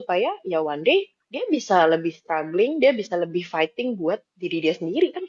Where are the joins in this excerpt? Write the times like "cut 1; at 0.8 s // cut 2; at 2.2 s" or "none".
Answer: none